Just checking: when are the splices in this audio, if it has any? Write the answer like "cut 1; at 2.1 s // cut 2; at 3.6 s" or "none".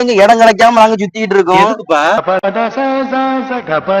cut 1; at 2.2 s